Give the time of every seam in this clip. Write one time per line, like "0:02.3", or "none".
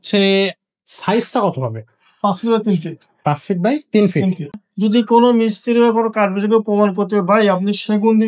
0:04.6